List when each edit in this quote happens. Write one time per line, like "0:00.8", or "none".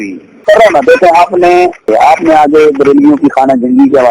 0:01.9